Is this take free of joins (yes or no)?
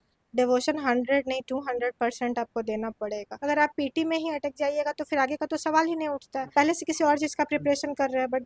no